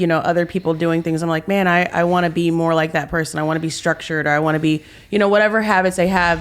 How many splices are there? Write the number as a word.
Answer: zero